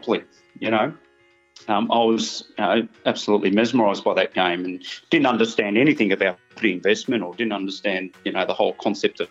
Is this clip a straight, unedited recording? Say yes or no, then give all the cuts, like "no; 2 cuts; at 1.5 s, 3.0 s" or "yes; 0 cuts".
yes; 0 cuts